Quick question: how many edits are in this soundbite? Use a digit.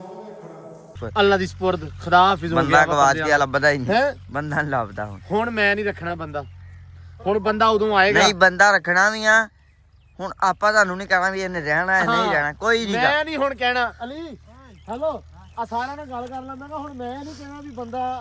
1